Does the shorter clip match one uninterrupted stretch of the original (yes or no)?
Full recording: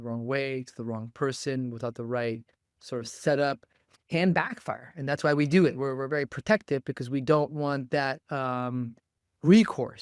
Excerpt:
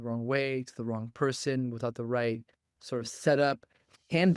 yes